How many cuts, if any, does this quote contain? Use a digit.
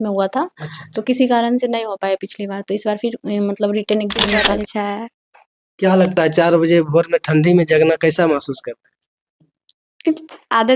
1